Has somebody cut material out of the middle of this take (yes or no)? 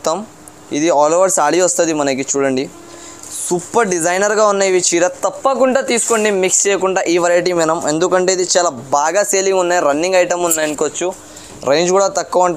no